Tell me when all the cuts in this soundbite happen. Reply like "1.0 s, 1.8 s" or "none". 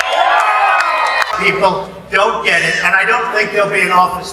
1.3 s